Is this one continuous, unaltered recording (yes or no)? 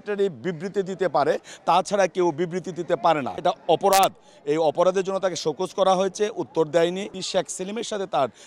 no